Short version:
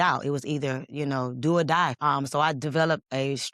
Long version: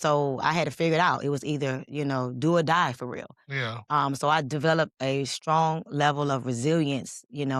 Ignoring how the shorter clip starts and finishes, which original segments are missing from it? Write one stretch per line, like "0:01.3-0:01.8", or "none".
0:02.9-0:03.8